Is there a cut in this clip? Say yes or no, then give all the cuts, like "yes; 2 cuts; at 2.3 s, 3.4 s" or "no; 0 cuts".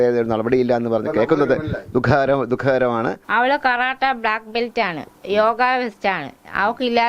yes; 1 cut; at 3.2 s